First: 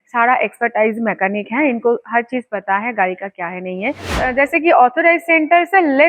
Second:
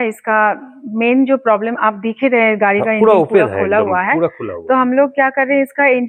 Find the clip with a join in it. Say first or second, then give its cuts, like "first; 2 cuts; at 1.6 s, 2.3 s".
first; 1 cut; at 4.2 s